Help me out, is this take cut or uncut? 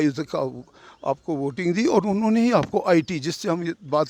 uncut